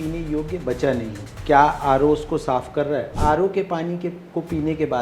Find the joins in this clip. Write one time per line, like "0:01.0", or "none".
0:01.3
0:03.1